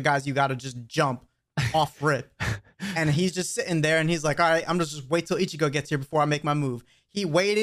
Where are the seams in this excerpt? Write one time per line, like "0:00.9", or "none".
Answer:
none